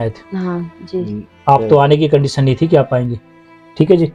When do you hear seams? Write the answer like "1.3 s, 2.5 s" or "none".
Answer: none